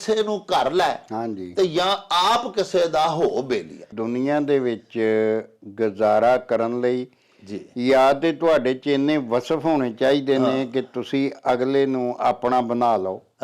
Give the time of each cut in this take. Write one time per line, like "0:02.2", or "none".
0:04.0